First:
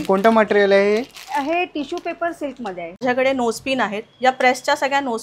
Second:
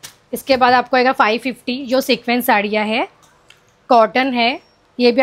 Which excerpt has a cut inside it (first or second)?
first